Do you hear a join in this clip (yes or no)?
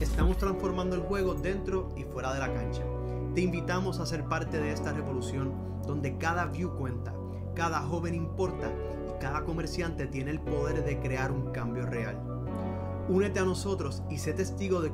no